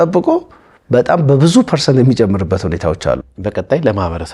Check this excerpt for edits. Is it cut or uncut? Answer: cut